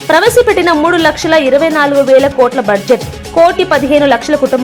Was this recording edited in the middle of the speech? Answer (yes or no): no